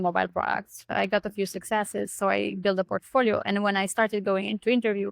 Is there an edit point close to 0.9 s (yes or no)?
yes